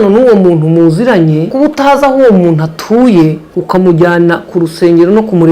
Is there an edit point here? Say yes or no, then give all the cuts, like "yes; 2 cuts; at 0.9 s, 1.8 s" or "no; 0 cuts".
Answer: yes; 2 cuts; at 1.5 s, 3.5 s